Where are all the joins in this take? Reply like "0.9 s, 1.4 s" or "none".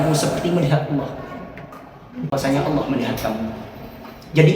2.3 s